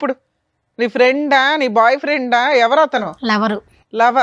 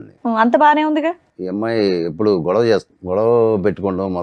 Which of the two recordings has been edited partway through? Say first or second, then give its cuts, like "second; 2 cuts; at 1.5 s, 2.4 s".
second; 2 cuts; at 1.3 s, 2.9 s